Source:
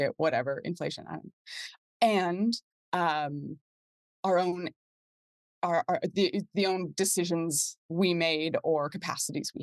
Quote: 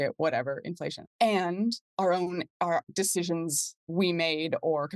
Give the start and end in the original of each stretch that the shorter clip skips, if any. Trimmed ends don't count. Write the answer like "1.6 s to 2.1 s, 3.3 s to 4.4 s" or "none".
1.0 s to 1.8 s, 2.7 s to 4.1 s, 5.1 s to 6.9 s